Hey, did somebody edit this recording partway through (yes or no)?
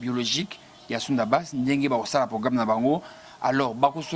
no